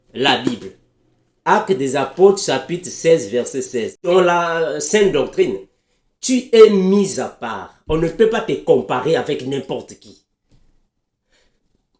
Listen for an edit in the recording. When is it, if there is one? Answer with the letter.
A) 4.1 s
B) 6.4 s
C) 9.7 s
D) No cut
A